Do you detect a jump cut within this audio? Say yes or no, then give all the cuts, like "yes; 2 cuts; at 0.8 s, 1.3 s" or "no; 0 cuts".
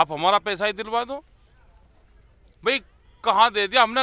no; 0 cuts